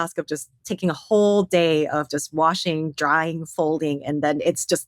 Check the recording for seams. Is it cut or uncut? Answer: uncut